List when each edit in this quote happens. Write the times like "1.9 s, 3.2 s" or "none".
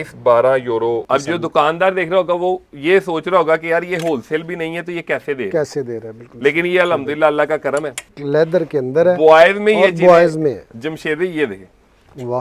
1.0 s, 8.2 s